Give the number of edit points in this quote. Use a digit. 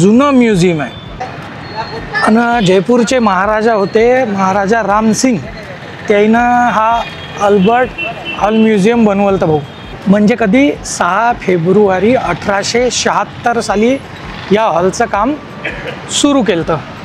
0